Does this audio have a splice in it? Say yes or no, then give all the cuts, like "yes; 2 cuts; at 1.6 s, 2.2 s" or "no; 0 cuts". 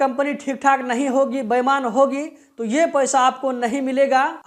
no; 0 cuts